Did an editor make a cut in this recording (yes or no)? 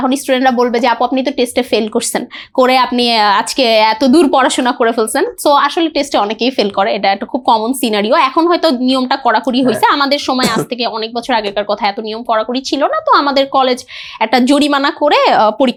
no